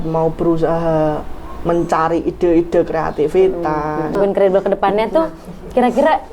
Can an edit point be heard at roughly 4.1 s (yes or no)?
yes